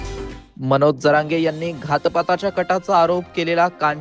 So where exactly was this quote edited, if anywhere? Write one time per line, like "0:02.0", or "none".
none